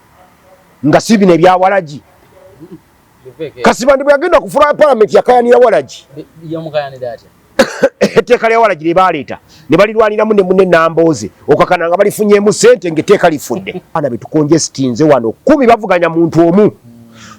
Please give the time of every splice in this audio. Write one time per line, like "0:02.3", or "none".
0:14.0